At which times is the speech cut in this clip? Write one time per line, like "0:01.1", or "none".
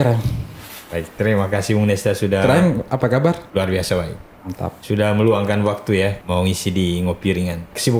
none